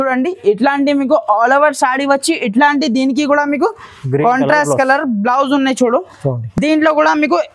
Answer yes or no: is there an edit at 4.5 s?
no